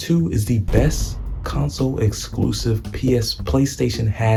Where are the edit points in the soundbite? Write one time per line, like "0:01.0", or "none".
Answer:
none